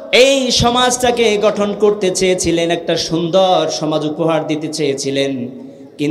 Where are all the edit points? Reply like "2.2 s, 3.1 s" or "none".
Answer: none